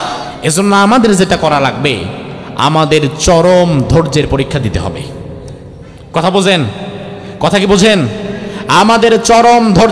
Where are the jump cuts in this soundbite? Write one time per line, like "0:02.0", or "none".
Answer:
none